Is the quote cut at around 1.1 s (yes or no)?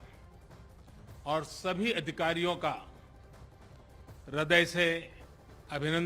no